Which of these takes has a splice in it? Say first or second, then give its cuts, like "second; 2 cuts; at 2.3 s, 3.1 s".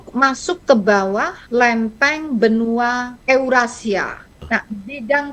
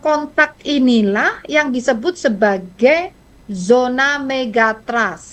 first; 3 cuts; at 1.4 s, 3.1 s, 4.4 s